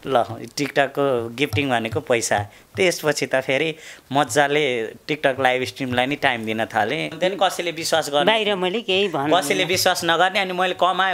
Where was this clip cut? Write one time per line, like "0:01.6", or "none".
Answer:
0:07.1